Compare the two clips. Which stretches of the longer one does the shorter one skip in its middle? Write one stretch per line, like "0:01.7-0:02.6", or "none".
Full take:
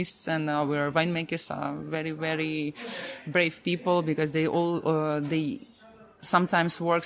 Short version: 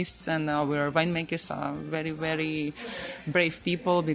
none